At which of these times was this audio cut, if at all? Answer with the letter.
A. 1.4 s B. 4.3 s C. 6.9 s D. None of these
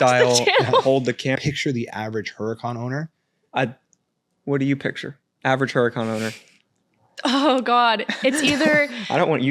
A